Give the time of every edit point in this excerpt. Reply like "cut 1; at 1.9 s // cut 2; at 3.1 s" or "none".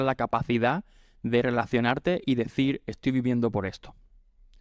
none